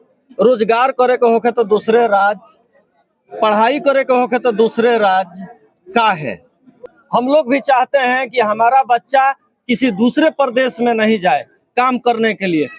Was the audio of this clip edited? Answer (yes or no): yes